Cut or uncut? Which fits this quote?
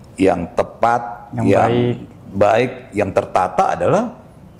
uncut